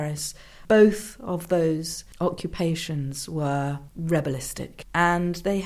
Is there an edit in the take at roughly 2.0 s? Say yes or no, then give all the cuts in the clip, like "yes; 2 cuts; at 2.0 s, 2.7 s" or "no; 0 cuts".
yes; 3 cuts; at 2.0 s, 3.9 s, 4.8 s